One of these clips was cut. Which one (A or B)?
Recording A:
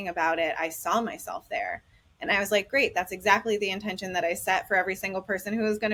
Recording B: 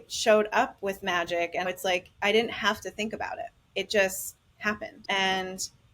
B